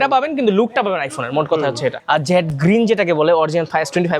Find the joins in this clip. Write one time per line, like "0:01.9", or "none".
0:02.0